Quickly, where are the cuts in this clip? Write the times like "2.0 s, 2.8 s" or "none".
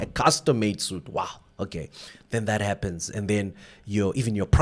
none